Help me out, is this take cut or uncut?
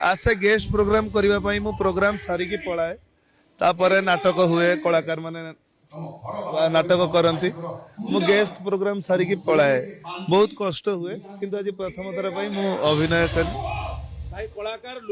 uncut